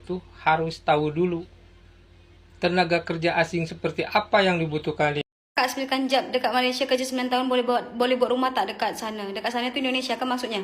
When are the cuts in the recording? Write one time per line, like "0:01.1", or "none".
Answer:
0:05.3